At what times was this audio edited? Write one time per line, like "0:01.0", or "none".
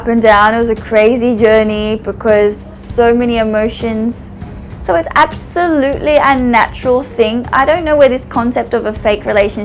0:04.7